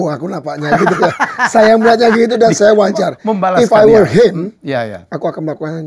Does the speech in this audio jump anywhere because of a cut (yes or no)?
no